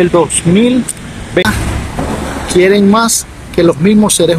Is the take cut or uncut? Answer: cut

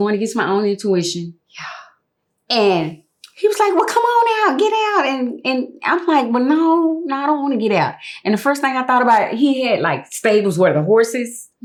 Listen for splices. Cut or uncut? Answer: uncut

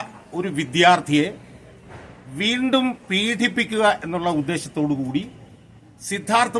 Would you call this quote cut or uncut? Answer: uncut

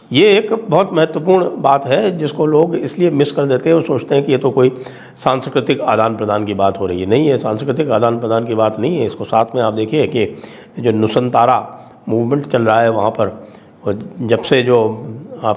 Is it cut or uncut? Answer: uncut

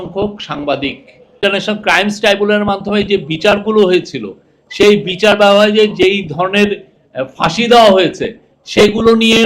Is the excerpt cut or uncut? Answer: cut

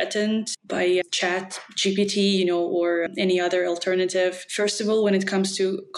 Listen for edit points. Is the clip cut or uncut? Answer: cut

